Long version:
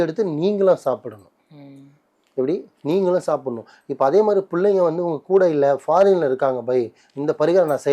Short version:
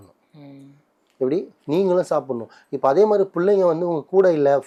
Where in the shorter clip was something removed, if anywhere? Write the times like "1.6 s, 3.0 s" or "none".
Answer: none